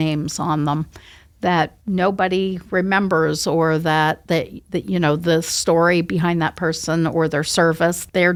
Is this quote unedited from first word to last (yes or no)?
yes